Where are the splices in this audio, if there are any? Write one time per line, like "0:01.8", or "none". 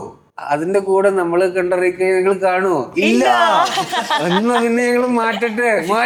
none